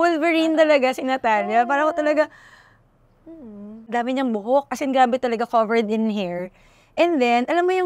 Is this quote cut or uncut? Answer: cut